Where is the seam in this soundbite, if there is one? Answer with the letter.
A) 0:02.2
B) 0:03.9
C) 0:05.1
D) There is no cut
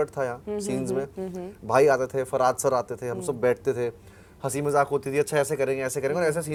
D